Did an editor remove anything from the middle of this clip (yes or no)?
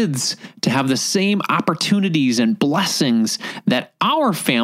no